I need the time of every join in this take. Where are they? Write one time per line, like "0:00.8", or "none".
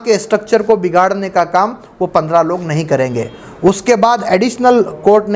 none

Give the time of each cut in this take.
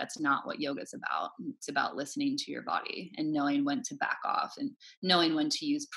none

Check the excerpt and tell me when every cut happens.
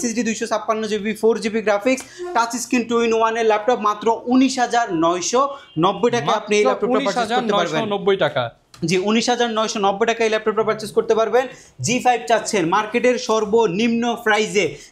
none

